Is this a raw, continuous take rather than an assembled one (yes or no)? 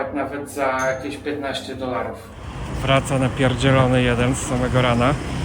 yes